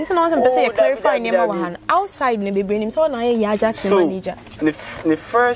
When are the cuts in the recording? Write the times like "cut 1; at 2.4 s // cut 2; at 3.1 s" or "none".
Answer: none